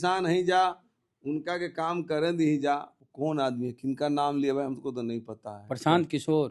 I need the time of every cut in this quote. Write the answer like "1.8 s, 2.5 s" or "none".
3.0 s